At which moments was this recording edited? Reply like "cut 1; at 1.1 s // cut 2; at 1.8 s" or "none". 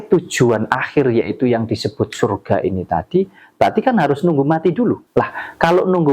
cut 1; at 5.0 s